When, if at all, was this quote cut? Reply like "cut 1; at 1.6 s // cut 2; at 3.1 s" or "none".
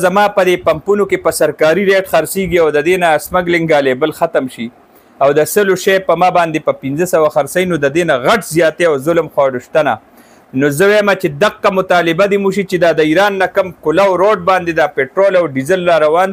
none

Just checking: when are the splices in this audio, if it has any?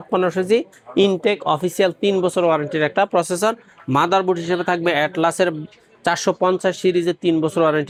none

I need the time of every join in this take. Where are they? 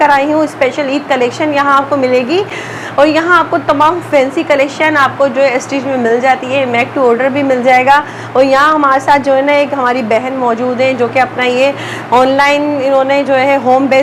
none

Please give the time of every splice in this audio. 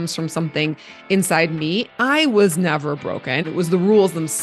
cut 1; at 1.9 s // cut 2; at 3.4 s

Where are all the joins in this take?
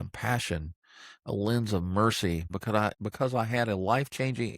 cut 1; at 2.6 s

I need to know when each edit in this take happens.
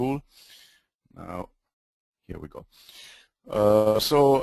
cut 1; at 1.1 s

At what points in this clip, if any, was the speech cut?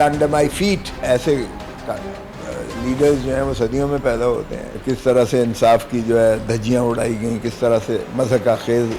cut 1; at 0.9 s // cut 2; at 4.8 s

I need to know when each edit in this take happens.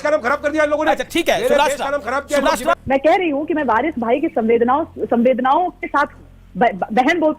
cut 1; at 2.7 s

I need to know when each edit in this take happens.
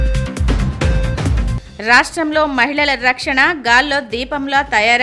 none

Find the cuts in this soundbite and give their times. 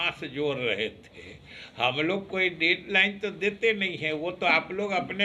none

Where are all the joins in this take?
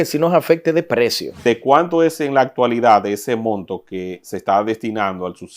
cut 1; at 1.4 s

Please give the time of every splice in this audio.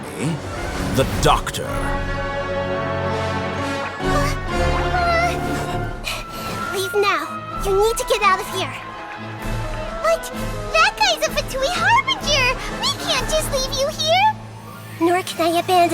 cut 1; at 5.9 s

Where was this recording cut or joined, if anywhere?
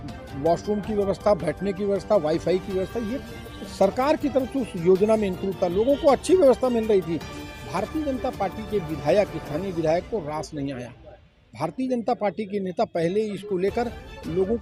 none

